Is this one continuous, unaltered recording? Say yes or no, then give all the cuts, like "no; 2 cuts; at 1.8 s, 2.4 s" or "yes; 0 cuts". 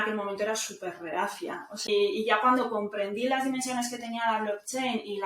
no; 1 cut; at 1.9 s